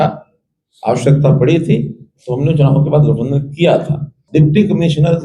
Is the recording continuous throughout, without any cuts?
no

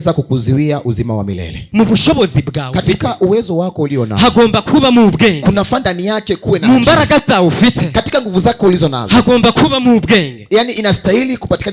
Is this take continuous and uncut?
no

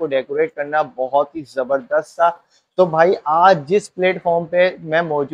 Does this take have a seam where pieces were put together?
no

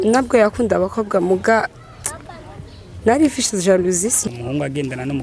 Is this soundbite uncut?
no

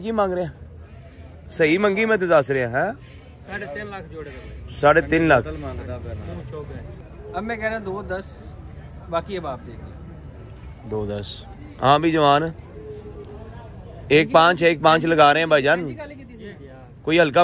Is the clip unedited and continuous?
no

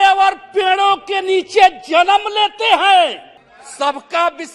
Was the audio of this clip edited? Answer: yes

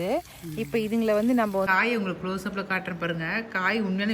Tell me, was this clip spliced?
yes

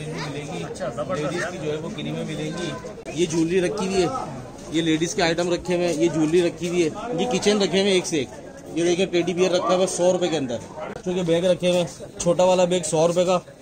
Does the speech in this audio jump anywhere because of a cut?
yes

